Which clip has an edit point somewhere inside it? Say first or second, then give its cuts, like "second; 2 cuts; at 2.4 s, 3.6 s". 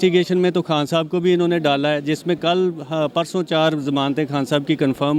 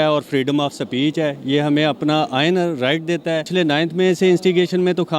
second; 1 cut; at 3.5 s